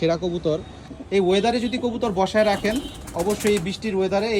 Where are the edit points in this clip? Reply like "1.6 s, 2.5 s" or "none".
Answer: 0.9 s